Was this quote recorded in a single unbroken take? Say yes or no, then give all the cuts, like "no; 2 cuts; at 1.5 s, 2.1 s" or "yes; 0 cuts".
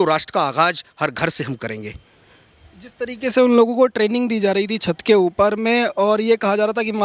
yes; 0 cuts